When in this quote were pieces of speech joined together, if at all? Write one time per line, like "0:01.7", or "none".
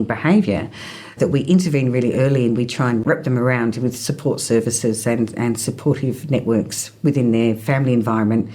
none